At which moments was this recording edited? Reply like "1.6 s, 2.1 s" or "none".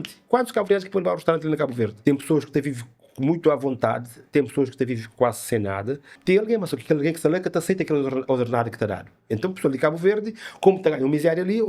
1.9 s, 6.1 s